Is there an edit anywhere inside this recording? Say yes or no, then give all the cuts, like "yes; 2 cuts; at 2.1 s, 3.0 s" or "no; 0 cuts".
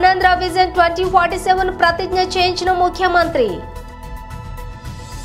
yes; 1 cut; at 3.6 s